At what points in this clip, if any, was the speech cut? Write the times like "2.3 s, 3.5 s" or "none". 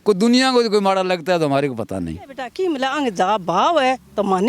2.4 s